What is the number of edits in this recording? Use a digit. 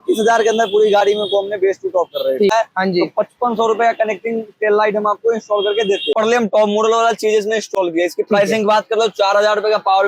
2